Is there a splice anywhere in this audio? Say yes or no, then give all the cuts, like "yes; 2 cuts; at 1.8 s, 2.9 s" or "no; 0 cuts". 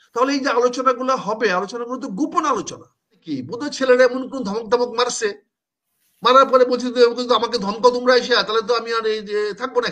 yes; 1 cut; at 3.3 s